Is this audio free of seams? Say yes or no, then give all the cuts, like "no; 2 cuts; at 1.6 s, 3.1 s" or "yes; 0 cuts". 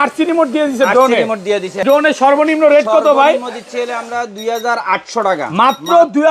no; 1 cut; at 1.8 s